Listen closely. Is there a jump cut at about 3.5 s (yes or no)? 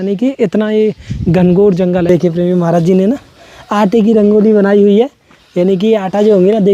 no